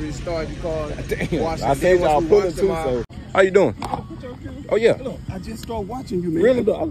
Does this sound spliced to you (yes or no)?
yes